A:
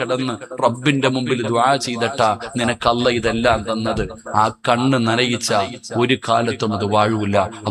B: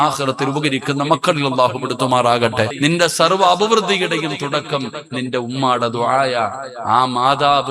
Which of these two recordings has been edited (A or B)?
B